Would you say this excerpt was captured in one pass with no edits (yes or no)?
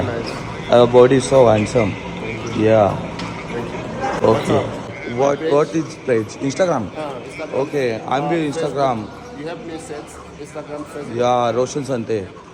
no